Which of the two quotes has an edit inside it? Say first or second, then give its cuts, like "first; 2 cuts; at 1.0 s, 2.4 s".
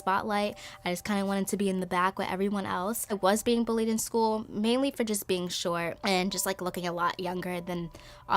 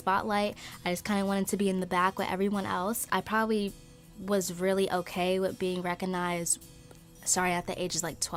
first; 2 cuts; at 3.1 s, 6.0 s